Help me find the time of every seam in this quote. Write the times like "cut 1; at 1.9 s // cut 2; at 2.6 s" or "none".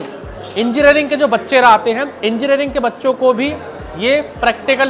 none